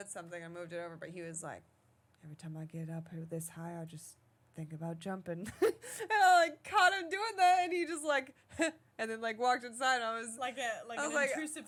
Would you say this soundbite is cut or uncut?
uncut